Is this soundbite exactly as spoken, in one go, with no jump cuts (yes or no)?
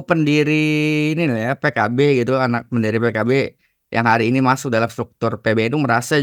yes